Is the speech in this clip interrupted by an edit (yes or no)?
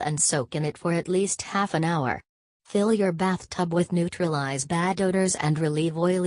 no